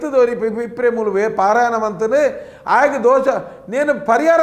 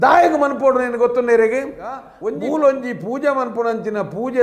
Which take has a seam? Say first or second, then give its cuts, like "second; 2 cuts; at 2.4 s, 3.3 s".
second; 1 cut; at 2.1 s